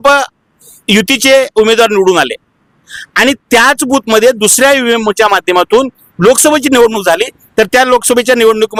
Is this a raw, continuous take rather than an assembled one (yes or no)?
yes